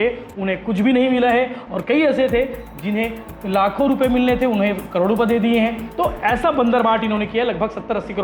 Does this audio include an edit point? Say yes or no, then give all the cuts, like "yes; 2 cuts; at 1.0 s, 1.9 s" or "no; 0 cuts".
no; 0 cuts